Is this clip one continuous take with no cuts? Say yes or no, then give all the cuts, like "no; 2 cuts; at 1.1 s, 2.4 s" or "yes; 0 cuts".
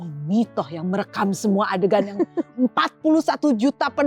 yes; 0 cuts